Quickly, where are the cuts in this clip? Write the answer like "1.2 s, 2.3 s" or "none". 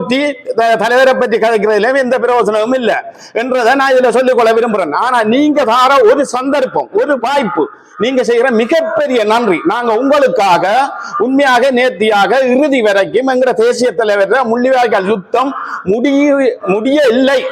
none

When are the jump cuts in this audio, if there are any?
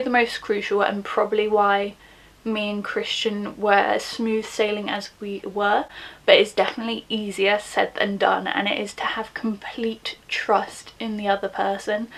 none

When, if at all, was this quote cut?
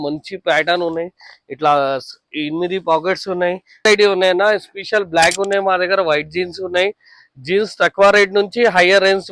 3.8 s

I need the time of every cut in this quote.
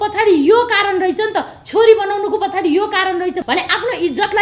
3.4 s

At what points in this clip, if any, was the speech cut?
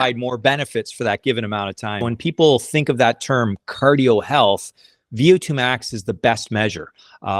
2.0 s

